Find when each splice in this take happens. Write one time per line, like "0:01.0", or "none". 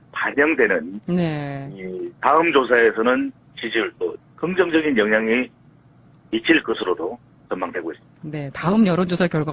0:05.5